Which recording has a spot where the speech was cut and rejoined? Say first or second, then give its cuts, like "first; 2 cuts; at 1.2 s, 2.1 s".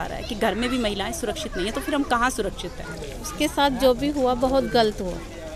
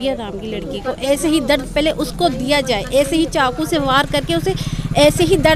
first; 1 cut; at 2.9 s